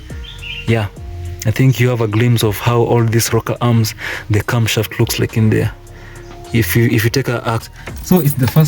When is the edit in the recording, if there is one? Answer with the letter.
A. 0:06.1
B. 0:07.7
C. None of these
B